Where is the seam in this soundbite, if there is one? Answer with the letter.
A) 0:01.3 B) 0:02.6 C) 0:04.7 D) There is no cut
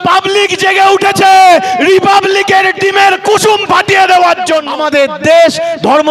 C